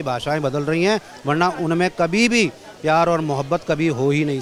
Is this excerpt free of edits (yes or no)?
yes